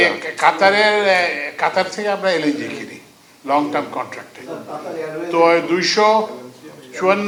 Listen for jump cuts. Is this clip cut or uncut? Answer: uncut